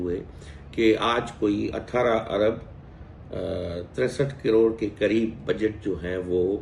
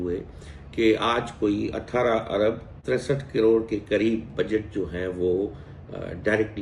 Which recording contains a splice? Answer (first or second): second